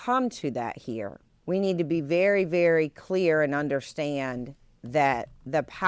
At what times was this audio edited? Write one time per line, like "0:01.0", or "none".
0:01.3